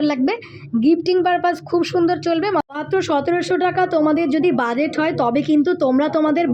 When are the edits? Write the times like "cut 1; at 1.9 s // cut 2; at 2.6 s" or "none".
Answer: cut 1; at 2.6 s